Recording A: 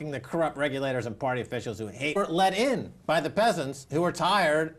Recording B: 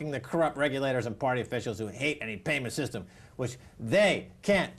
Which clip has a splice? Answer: B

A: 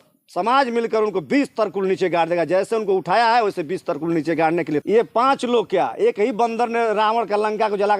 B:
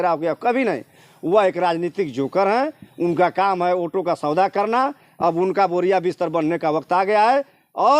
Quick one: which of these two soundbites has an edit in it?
A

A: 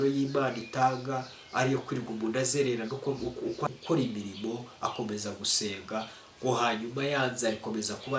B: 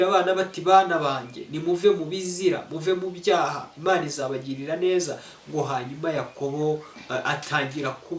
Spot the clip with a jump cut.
A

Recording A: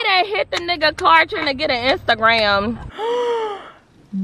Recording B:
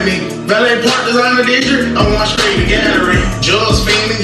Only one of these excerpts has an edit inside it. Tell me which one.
A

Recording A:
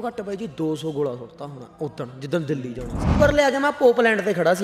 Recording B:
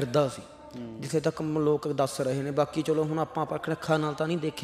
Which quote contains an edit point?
A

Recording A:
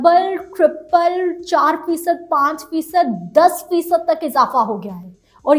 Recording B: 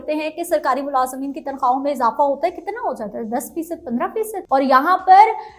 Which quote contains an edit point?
B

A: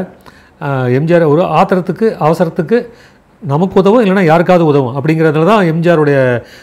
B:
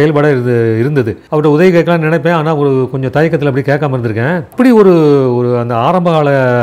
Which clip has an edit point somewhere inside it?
B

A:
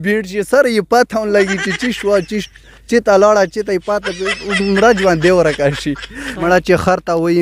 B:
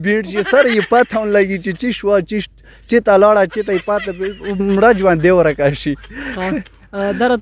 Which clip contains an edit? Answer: A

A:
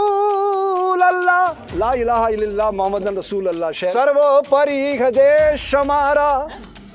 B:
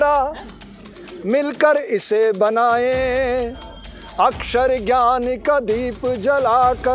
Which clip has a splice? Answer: A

